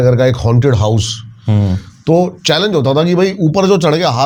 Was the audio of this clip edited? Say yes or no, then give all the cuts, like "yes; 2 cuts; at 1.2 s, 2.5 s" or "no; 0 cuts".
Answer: no; 0 cuts